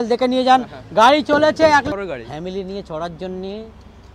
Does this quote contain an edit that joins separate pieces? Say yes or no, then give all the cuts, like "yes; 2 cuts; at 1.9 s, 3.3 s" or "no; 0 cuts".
yes; 1 cut; at 1.9 s